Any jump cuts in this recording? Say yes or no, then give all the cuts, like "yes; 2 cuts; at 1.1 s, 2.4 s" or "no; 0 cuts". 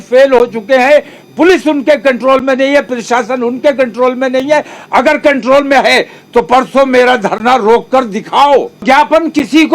yes; 1 cut; at 8.8 s